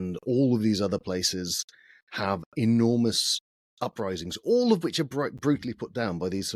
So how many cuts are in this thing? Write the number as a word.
zero